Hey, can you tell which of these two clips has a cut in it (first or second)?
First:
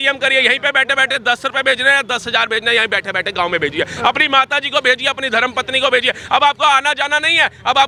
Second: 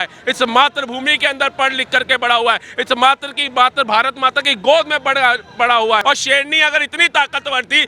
second